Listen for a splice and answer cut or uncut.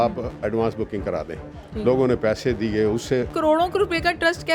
cut